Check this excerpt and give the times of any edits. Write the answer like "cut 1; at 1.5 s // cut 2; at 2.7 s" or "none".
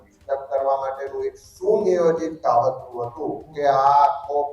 cut 1; at 3.4 s